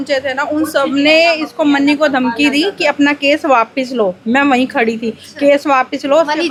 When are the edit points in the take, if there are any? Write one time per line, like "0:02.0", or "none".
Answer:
none